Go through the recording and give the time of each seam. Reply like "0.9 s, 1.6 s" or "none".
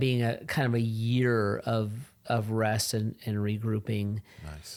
none